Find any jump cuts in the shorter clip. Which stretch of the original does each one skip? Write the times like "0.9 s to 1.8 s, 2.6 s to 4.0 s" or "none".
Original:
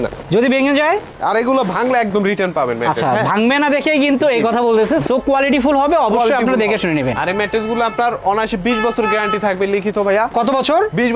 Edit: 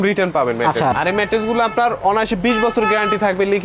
3.1 s to 7.1 s